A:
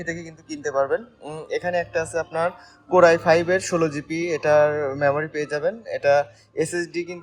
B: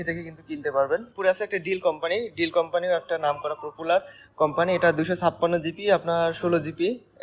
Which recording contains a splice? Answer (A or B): B